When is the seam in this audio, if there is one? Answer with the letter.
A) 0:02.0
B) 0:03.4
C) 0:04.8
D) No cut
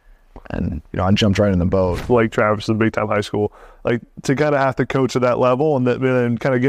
A